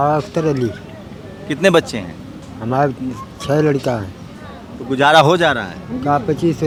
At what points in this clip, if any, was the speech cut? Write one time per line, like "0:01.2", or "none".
none